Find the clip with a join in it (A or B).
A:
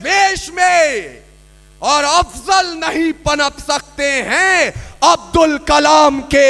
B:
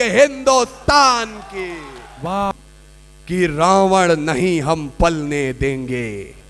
B